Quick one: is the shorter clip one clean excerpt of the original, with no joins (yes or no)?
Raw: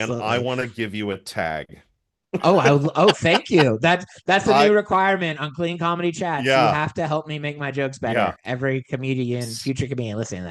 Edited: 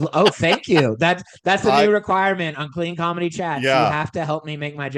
yes